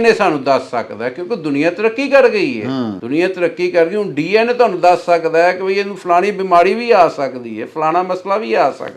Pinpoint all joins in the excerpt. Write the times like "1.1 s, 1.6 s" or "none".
3.0 s